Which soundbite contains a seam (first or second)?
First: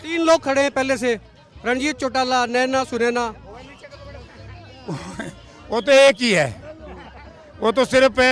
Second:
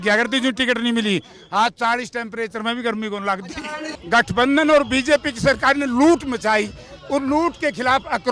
second